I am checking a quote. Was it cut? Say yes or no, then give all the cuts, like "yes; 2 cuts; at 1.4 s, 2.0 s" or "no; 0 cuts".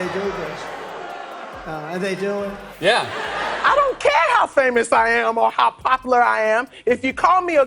yes; 1 cut; at 2.7 s